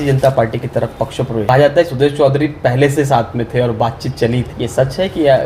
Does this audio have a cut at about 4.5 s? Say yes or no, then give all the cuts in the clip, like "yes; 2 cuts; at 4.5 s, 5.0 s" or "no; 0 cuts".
yes; 2 cuts; at 1.5 s, 4.5 s